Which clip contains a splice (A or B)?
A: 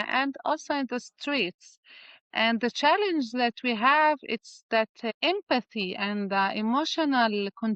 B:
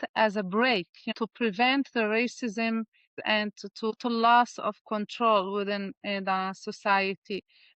B